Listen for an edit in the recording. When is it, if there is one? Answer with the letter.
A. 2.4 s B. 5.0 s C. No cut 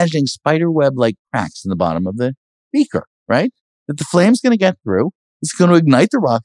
C